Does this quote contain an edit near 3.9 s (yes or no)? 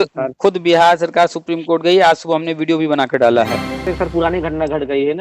yes